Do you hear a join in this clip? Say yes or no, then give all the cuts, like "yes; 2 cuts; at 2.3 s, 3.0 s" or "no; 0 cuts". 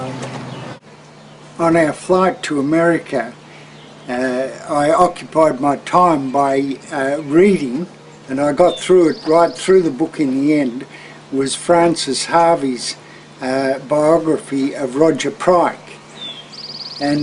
yes; 1 cut; at 12.2 s